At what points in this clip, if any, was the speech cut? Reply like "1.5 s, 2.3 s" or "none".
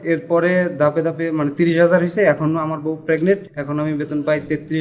3.5 s